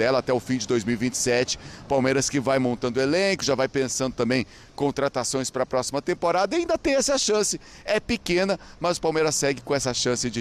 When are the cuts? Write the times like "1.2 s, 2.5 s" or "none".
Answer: none